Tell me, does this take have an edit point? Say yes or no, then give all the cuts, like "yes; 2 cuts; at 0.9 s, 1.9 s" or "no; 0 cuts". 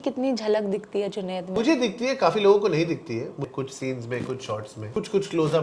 yes; 3 cuts; at 1.5 s, 3.4 s, 4.9 s